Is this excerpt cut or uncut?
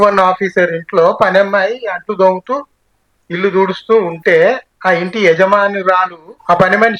uncut